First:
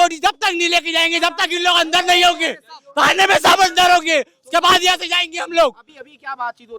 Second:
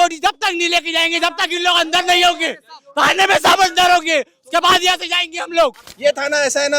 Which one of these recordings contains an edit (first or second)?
second